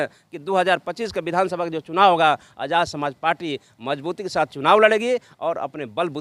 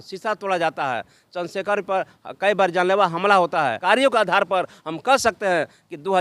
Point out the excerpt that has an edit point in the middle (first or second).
second